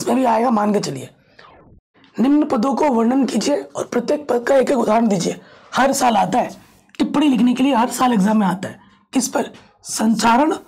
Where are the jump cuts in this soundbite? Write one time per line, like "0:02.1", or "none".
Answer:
0:01.8